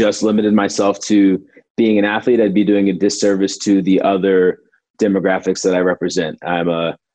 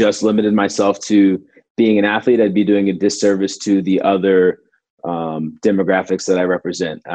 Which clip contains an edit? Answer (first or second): first